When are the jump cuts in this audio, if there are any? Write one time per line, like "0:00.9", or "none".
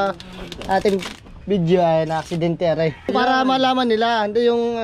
0:03.1